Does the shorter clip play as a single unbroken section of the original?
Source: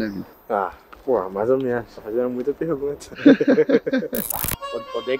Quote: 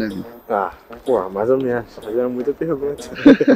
yes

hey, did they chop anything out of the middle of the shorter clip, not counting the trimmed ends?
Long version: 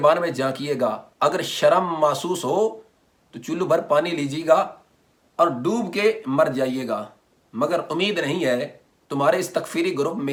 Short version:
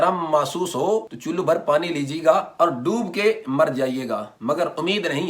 yes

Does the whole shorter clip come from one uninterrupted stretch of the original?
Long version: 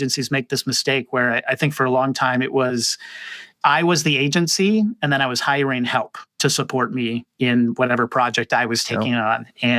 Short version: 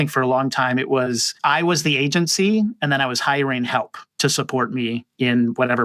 no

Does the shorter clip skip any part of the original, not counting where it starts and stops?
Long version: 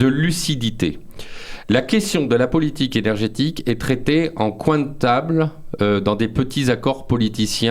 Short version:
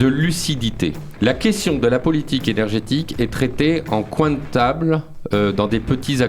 yes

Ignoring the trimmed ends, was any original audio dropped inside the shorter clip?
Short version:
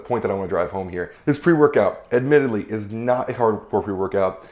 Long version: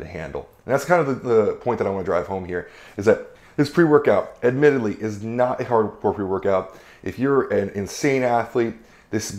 yes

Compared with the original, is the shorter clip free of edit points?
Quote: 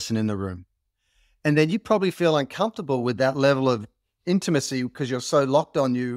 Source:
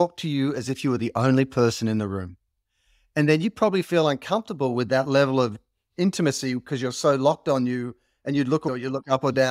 yes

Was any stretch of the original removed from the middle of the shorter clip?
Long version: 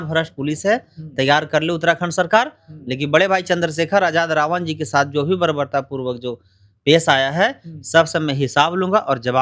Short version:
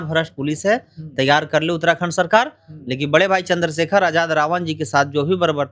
no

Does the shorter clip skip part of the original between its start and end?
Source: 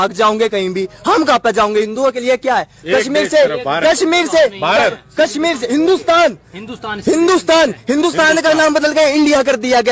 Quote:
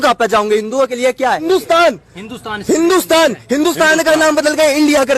yes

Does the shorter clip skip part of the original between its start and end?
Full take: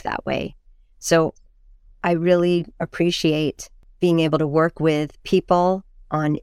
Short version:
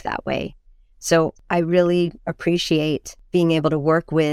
yes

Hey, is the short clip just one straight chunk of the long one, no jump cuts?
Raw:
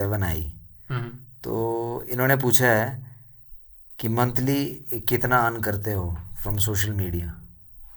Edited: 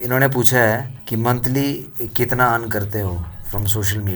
no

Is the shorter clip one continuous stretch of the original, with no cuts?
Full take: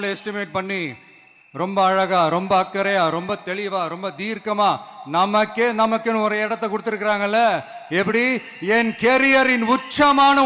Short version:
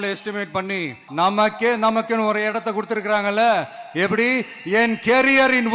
no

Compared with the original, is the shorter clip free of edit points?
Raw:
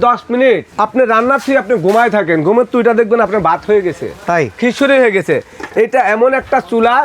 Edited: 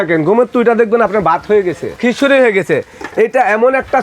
no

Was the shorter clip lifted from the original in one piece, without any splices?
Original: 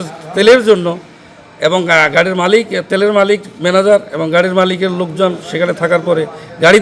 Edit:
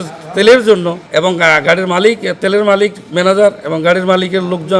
no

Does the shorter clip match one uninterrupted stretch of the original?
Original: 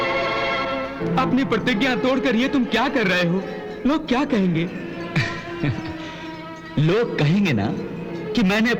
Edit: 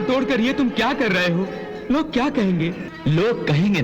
no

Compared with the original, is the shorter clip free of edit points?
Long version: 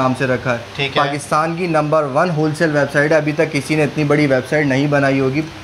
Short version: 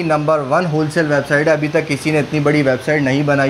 yes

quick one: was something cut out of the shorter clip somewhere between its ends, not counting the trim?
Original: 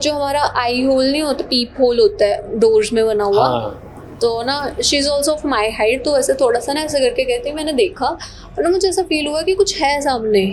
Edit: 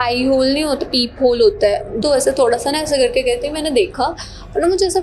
yes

